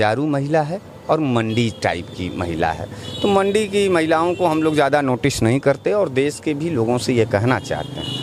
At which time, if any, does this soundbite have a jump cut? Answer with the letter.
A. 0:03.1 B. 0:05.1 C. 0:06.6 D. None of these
D